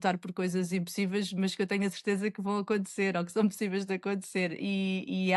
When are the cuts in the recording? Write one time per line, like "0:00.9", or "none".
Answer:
none